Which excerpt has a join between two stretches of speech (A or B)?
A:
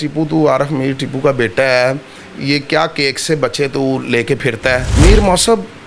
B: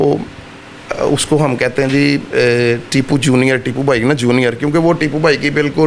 A